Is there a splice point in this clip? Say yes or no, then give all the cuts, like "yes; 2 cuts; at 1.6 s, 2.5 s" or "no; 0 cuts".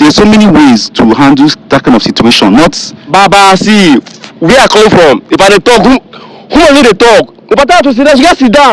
no; 0 cuts